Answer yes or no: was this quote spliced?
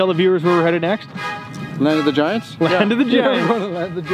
no